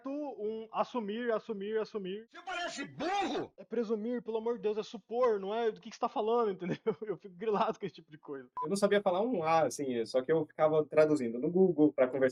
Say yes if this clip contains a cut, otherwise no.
yes